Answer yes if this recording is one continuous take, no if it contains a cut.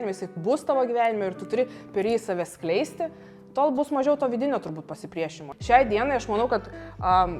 no